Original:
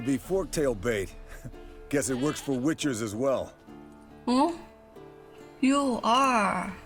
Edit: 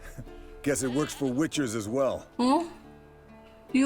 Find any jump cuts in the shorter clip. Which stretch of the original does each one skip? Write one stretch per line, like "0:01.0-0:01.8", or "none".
0:03.5-0:04.1